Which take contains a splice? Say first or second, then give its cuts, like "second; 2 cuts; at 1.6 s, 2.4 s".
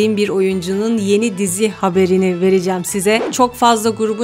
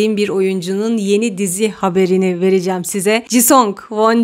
first; 1 cut; at 3.3 s